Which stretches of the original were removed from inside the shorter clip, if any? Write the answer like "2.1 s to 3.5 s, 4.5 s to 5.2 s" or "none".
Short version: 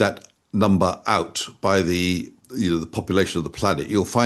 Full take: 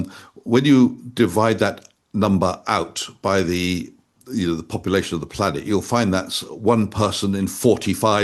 4.0 s to 4.1 s